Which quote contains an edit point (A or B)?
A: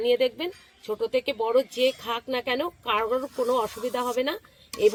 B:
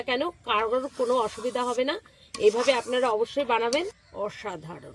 B